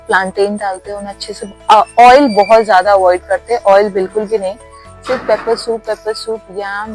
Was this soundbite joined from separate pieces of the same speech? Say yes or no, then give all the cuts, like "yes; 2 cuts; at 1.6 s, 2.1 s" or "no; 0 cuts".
no; 0 cuts